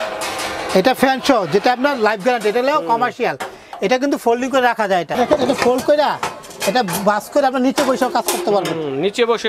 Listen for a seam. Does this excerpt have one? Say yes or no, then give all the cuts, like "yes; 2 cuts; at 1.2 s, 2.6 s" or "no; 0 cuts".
yes; 1 cut; at 5.2 s